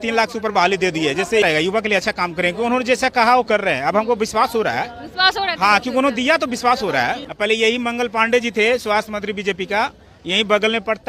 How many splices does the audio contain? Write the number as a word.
two